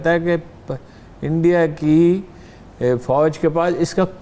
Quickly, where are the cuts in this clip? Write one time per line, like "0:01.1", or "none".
none